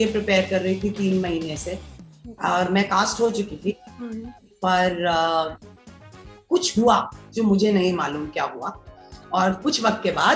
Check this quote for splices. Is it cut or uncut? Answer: uncut